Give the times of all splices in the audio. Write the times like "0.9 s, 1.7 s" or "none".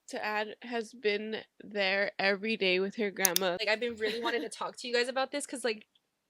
3.6 s